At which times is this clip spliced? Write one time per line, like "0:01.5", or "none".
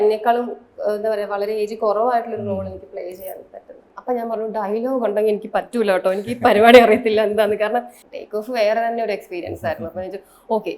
0:03.9
0:08.0